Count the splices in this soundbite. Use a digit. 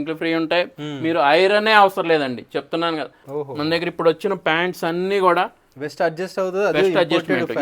1